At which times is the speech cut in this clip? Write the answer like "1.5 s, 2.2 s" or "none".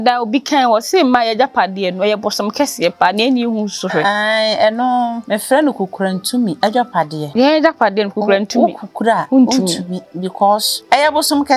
5.2 s, 6.9 s, 9.2 s, 10.8 s